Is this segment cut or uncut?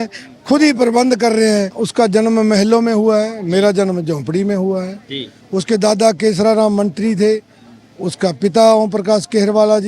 cut